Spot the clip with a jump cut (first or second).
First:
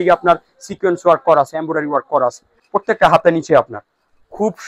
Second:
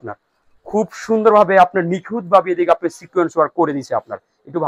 first